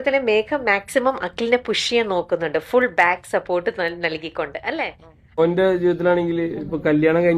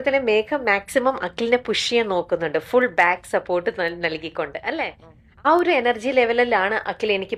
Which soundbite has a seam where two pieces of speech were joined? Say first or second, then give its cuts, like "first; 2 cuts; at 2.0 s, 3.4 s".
first; 1 cut; at 5.3 s